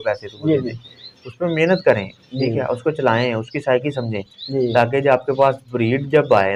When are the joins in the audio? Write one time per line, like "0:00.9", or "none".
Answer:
none